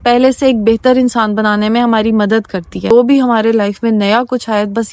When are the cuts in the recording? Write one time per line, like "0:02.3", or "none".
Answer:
0:02.9